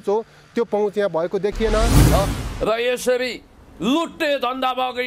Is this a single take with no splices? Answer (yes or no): no